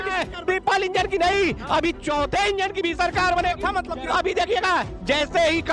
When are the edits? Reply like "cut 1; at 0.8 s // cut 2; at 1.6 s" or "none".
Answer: none